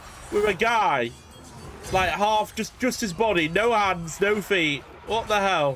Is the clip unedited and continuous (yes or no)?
yes